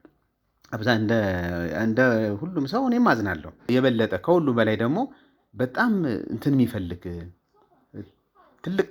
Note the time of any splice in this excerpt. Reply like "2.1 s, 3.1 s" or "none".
3.7 s